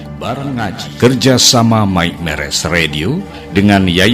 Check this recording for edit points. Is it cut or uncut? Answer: cut